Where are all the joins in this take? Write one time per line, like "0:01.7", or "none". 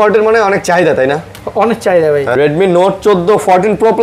0:02.3